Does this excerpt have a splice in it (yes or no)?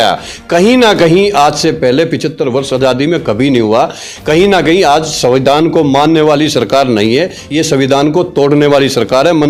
no